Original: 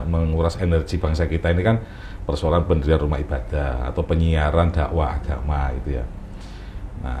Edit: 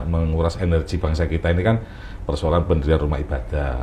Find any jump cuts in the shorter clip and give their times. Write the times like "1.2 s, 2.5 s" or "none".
none